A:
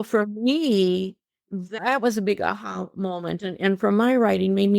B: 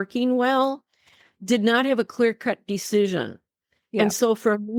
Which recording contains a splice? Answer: A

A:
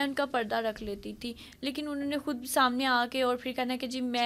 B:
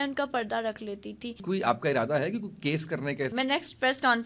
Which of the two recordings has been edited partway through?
B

